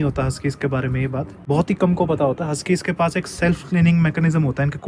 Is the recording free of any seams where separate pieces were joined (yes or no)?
no